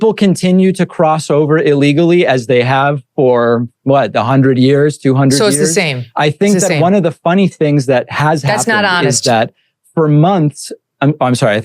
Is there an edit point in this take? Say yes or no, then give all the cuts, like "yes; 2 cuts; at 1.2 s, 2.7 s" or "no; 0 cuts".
no; 0 cuts